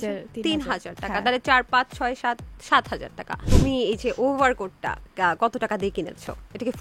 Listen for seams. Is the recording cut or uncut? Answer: cut